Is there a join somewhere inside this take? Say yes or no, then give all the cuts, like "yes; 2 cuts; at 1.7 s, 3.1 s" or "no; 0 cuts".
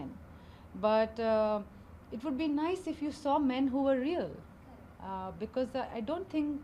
no; 0 cuts